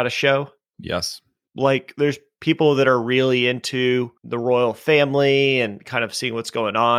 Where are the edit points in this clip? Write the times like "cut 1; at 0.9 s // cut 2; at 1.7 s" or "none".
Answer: cut 1; at 1.4 s // cut 2; at 4.2 s